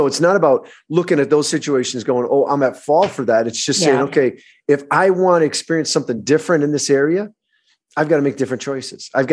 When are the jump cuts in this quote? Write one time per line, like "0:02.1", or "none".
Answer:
none